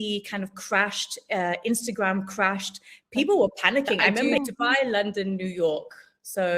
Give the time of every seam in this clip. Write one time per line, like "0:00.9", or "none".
0:04.3